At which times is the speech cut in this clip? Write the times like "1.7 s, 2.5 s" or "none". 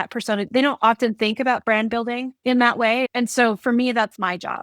2.3 s, 3.1 s